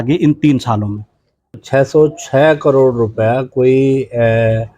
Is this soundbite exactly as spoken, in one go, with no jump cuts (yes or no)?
no